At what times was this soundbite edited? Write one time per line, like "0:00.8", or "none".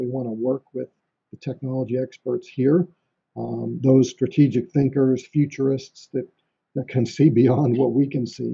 none

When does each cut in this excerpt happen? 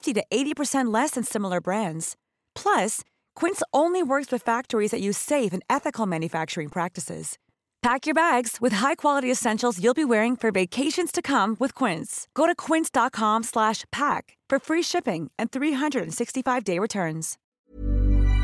0:17.4

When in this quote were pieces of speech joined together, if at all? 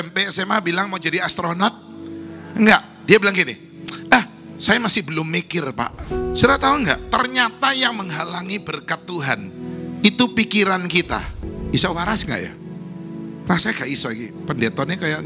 0:06.0
0:11.5

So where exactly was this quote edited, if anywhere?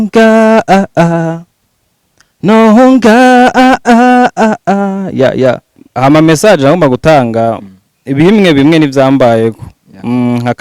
0:05.8

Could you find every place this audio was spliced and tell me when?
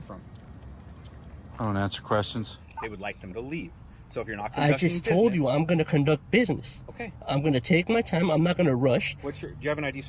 0:02.6

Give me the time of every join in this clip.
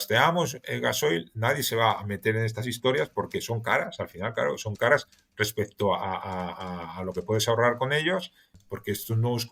0:08.6

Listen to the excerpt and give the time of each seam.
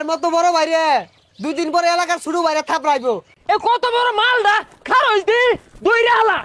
0:03.3

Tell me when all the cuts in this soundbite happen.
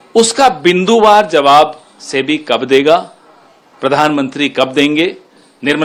none

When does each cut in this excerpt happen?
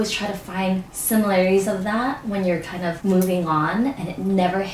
0:00.9
0:03.0

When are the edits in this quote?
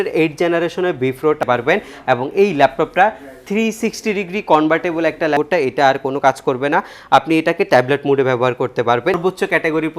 0:01.4
0:05.4
0:09.2

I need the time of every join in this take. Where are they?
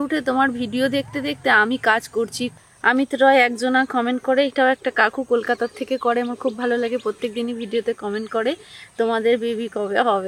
0:02.6

